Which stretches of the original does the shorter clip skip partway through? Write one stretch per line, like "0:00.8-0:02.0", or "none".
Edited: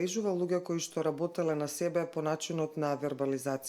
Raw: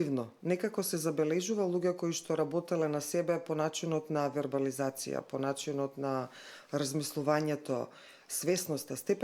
none